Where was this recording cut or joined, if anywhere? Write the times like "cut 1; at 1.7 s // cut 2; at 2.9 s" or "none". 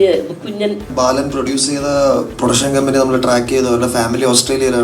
cut 1; at 0.9 s